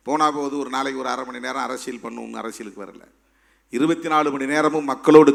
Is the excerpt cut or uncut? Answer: uncut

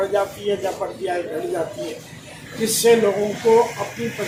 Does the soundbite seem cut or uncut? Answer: uncut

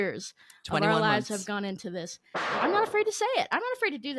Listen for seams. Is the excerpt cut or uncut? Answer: cut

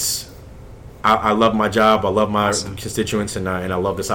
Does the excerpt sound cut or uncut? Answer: uncut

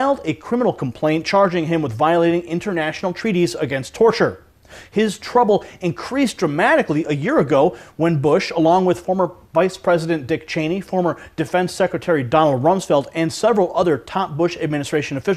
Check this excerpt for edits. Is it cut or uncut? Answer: uncut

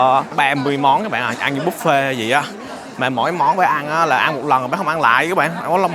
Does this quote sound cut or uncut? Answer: uncut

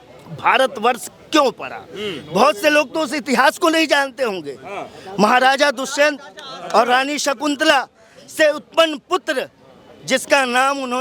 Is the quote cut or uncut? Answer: uncut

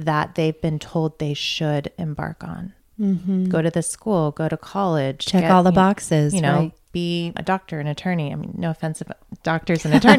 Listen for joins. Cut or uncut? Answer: cut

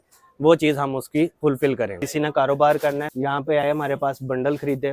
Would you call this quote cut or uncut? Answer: cut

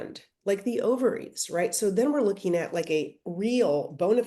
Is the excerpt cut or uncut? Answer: uncut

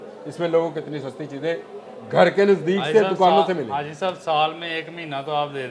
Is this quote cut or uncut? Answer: uncut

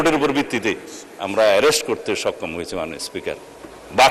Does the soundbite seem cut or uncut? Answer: uncut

